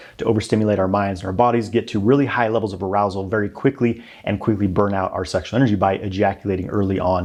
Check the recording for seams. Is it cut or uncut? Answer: uncut